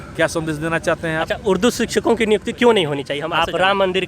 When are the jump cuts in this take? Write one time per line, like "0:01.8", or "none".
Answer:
0:03.2